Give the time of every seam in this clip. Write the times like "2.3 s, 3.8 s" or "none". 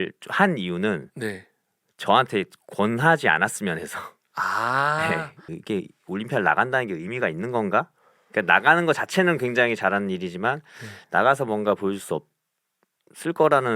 5.4 s